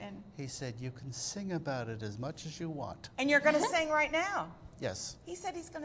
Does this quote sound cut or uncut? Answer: cut